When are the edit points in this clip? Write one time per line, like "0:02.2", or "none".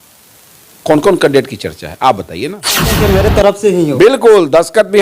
0:02.9

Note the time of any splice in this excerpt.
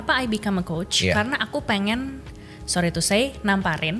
none

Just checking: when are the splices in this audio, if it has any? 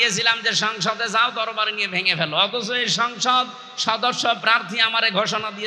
none

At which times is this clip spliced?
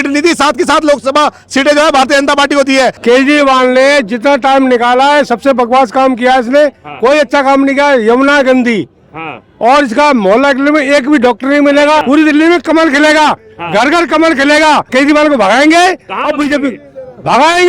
0:03.0
0:12.0
0:14.9

